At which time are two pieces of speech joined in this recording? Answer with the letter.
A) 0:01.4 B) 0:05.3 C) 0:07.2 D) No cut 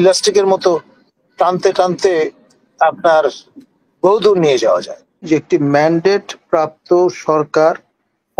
B